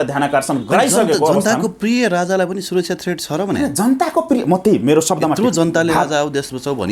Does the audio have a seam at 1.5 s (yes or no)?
no